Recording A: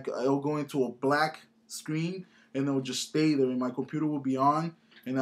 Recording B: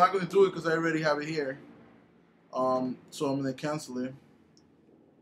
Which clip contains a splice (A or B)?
A